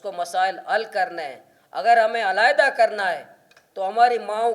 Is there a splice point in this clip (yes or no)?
no